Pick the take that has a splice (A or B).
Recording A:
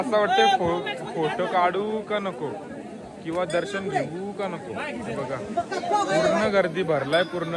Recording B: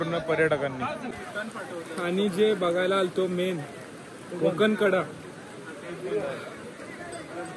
B